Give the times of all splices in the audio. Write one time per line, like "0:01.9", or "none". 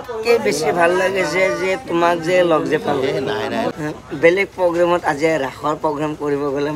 0:03.7

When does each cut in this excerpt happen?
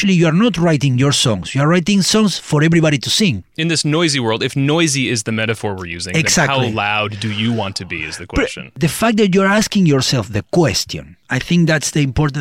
0:08.7

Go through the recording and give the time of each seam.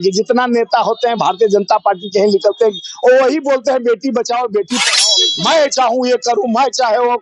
0:05.0

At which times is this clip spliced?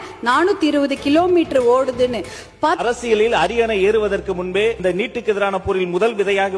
0:02.8

